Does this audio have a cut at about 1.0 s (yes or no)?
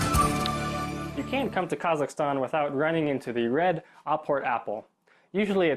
yes